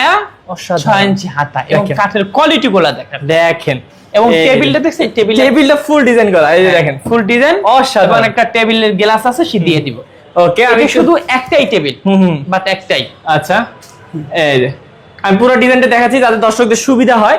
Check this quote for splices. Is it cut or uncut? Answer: uncut